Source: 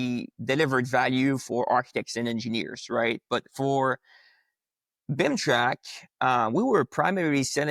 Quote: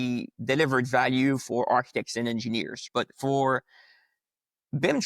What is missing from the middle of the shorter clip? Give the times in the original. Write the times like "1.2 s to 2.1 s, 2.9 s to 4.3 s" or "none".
2.9 s to 3.2 s